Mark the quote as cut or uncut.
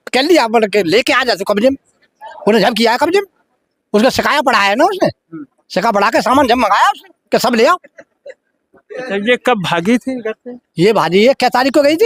uncut